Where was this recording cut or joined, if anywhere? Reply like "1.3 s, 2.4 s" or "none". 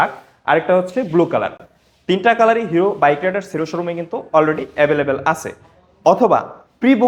none